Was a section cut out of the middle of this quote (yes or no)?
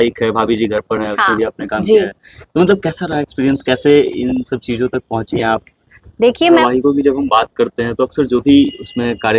yes